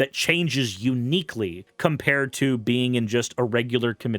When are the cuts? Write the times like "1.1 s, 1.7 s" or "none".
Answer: 1.6 s